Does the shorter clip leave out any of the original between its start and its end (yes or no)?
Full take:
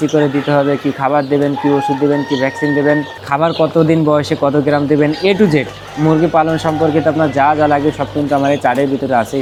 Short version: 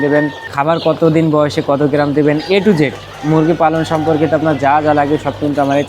no